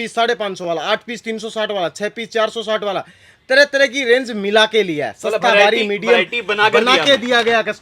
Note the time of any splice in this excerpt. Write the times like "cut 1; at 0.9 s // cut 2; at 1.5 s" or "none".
none